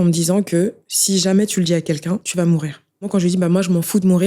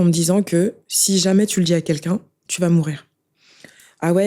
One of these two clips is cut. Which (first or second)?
first